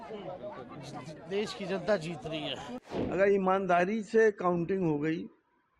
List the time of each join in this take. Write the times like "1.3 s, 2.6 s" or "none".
2.7 s